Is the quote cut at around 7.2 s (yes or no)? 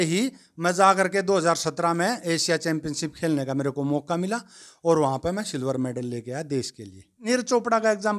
yes